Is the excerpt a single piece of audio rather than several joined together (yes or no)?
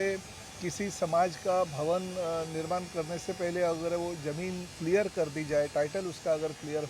yes